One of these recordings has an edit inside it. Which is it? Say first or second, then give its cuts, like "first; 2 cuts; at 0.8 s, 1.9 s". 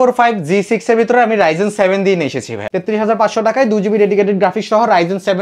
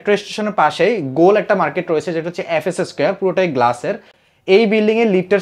first; 1 cut; at 2.6 s